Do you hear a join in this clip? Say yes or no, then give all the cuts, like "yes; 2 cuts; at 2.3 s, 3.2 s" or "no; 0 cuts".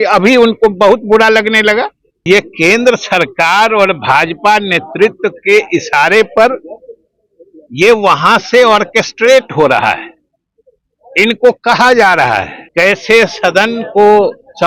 yes; 2 cuts; at 2.2 s, 12.7 s